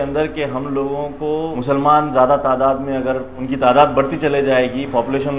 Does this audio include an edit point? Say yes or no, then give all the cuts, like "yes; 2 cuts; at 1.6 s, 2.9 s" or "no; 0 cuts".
yes; 2 cuts; at 1.5 s, 3.4 s